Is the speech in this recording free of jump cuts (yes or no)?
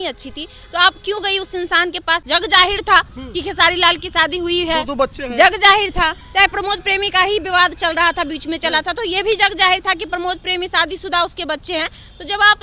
no